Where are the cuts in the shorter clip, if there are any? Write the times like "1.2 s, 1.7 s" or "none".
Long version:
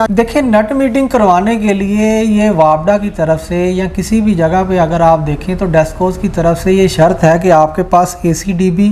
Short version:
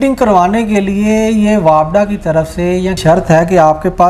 3.0 s

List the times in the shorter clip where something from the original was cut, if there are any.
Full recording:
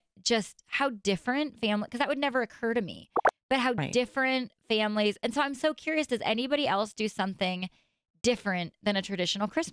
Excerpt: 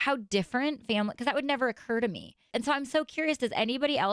2.4 s

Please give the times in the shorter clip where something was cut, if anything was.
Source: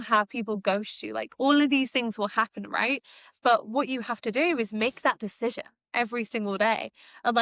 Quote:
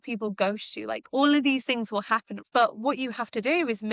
2.3 s

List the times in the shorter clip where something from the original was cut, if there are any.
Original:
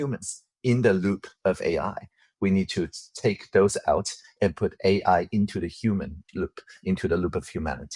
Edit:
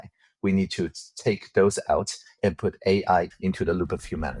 3.3 s

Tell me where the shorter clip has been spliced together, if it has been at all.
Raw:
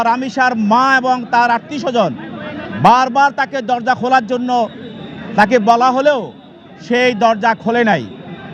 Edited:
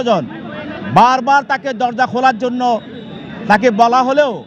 none

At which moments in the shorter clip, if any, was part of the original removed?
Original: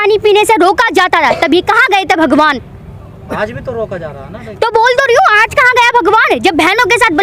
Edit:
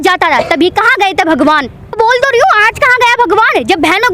1.9 s

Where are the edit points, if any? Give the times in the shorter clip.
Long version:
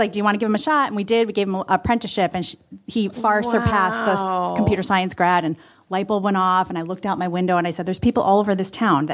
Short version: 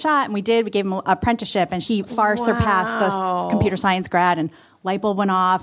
1.8 s

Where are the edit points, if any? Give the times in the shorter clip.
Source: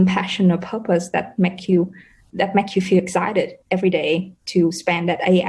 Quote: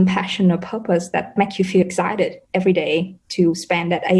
1.3 s

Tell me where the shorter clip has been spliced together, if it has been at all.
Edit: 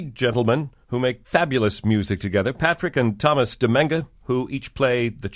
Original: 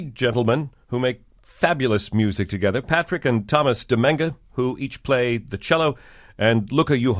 1.2 s

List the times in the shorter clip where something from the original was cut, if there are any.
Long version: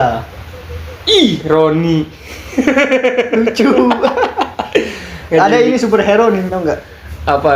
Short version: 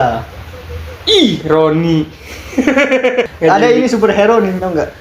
3.3 s

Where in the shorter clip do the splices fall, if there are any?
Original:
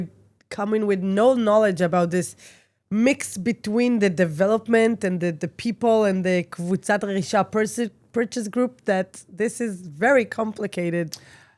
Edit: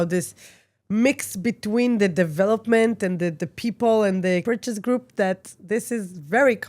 4.4 s

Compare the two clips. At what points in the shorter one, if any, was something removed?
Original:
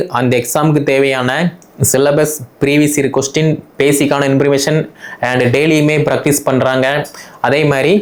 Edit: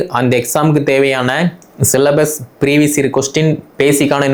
none

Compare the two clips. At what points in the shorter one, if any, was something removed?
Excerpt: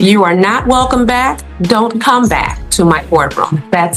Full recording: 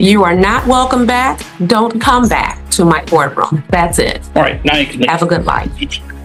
none

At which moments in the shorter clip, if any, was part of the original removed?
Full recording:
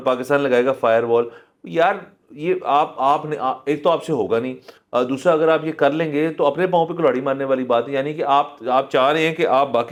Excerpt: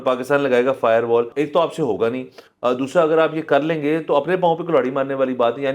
1.3 s

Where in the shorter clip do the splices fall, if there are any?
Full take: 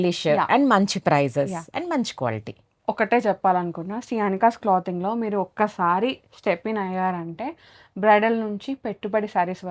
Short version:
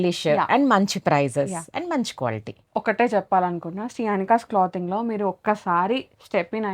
2.5 s

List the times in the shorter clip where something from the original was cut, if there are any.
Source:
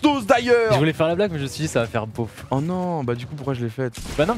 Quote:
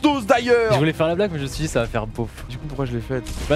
2.5 s

